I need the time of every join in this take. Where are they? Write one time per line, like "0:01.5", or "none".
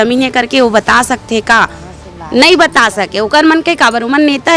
none